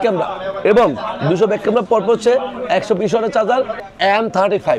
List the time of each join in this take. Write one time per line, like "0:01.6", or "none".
0:03.8